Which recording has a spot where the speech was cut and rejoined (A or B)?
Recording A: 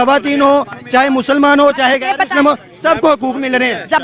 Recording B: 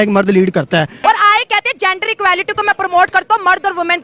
B